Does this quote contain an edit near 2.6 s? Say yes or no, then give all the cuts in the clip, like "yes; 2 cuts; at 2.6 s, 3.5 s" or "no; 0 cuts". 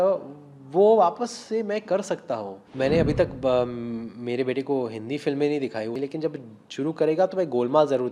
yes; 2 cuts; at 2.6 s, 6.0 s